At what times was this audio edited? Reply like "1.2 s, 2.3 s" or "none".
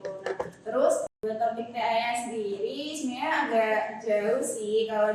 1.1 s